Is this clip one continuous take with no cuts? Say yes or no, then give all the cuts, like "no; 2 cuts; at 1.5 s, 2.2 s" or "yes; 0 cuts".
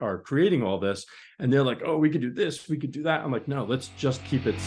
yes; 0 cuts